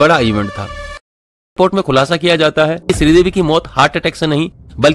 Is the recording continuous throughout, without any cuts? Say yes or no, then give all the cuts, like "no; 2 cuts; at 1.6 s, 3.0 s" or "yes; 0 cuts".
no; 2 cuts; at 1.5 s, 2.8 s